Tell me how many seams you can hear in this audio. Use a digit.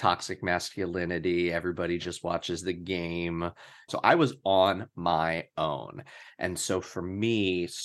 1